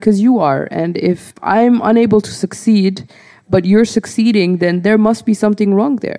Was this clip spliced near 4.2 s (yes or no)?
no